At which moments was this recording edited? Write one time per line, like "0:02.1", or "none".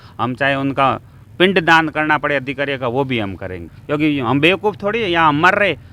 0:03.7